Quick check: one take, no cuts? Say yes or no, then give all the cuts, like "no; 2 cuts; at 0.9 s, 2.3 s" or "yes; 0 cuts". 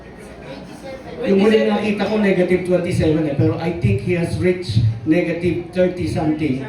yes; 0 cuts